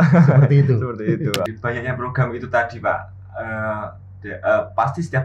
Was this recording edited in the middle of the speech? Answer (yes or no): yes